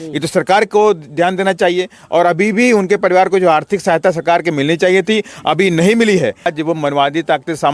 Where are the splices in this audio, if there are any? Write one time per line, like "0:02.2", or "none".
0:06.5